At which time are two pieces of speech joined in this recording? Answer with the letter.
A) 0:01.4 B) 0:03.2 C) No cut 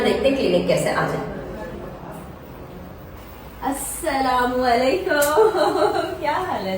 B